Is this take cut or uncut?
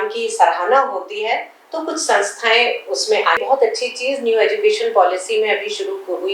cut